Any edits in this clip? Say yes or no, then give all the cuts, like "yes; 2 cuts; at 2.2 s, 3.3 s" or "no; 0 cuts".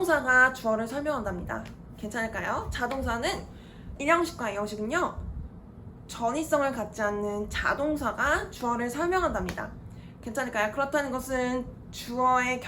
yes; 1 cut; at 4.0 s